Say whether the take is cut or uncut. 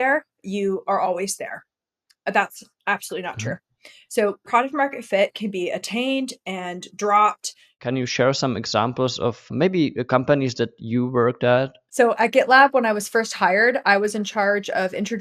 cut